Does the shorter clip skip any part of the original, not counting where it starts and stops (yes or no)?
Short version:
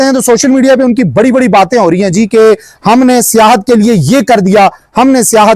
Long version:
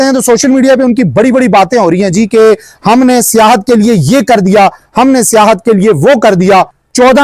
no